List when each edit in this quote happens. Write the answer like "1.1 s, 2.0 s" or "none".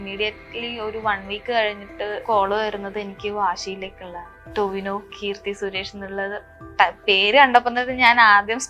2.2 s, 4.3 s

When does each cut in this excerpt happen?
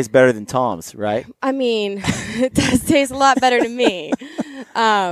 none

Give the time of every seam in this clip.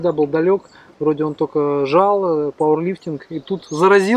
none

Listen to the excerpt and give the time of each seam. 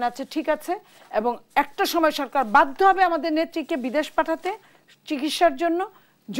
none

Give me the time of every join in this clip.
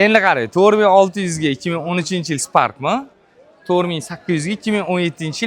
none

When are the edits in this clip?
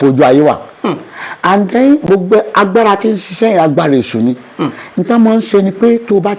none

